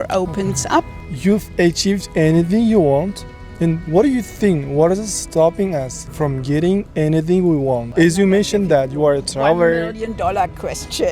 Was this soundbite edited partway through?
yes; 2 cuts; at 1.0 s, 7.9 s

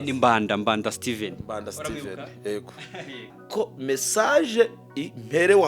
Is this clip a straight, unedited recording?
no; 1 cut; at 3.3 s

